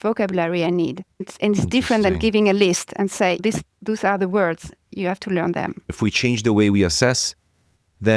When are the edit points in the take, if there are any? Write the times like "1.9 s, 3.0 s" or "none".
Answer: 5.9 s